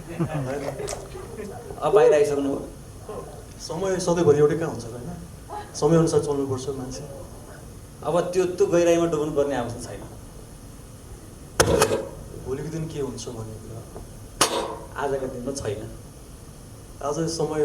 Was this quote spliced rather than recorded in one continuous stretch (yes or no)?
no